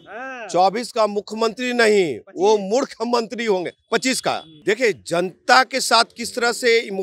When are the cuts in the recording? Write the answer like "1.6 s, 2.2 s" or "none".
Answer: 4.5 s